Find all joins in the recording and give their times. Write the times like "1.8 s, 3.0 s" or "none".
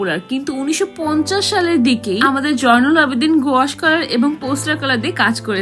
none